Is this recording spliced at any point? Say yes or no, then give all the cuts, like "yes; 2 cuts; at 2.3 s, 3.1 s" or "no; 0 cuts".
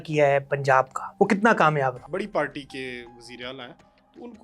yes; 2 cuts; at 1.0 s, 2.0 s